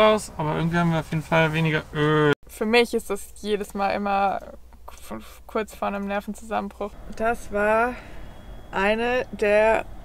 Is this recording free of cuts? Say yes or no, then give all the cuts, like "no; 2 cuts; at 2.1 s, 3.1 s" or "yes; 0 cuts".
no; 2 cuts; at 2.3 s, 6.9 s